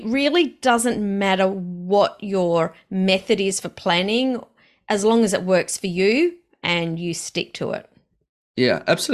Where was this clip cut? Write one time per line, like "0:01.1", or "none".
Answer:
none